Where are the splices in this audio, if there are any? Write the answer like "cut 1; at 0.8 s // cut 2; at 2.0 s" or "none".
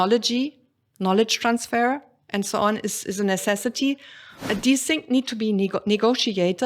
cut 1; at 4.4 s